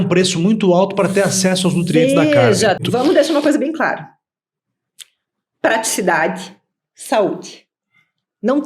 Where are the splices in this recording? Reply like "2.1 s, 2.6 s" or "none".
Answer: 2.8 s